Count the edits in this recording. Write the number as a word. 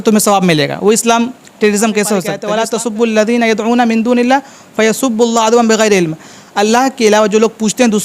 one